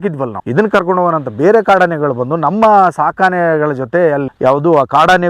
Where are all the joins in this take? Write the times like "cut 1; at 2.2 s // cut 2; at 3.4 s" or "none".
cut 1; at 4.3 s